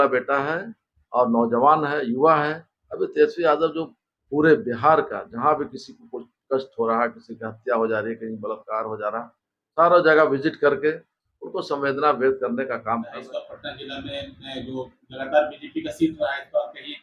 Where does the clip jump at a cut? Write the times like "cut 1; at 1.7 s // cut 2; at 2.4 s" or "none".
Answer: cut 1; at 13.2 s